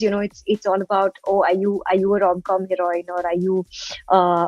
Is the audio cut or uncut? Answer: uncut